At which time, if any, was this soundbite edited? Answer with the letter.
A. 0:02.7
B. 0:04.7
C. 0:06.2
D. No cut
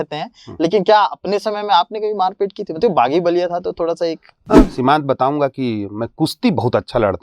B